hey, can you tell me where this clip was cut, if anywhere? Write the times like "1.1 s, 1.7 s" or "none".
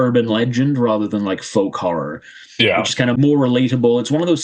3.2 s